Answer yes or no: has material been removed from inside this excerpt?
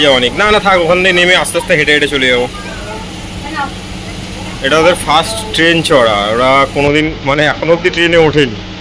no